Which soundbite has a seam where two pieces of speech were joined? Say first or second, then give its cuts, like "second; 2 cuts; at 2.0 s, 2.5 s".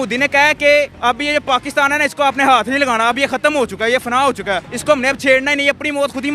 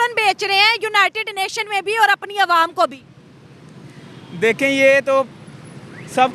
first; 2 cuts; at 0.9 s, 4.7 s